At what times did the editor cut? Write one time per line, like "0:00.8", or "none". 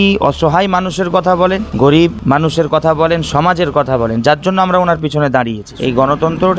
0:01.7
0:05.7